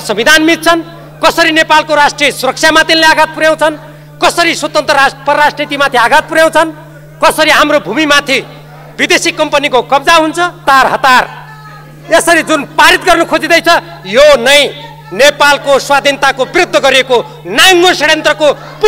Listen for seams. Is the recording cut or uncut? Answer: cut